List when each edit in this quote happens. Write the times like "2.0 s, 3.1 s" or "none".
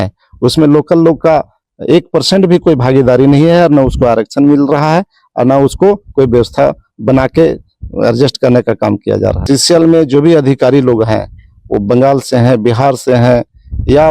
9.4 s